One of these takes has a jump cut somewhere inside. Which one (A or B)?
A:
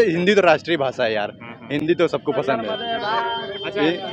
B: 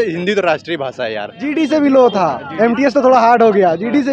B